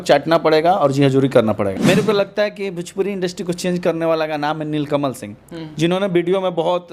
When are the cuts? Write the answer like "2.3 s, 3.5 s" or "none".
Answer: 1.7 s